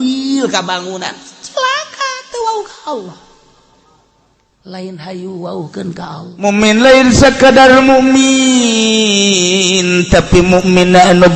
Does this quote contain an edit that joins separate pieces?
yes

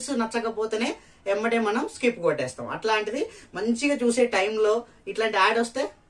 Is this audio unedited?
yes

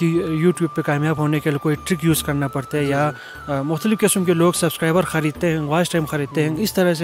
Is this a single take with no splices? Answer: yes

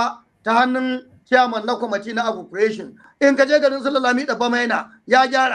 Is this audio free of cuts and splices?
no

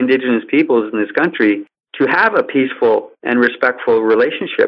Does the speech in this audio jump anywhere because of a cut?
yes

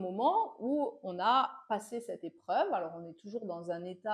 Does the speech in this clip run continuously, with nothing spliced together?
yes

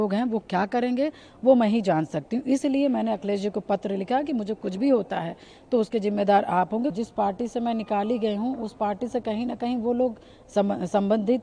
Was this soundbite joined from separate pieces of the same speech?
yes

